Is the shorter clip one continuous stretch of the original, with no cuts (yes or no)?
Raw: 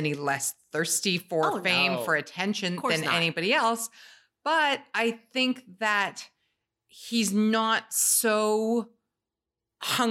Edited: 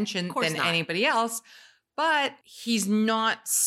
no